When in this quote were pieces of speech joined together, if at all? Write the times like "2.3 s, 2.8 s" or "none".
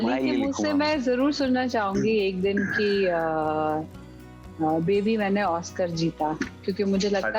none